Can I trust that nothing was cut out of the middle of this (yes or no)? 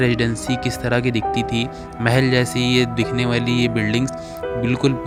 yes